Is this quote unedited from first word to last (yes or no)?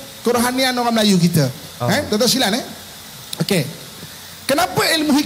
yes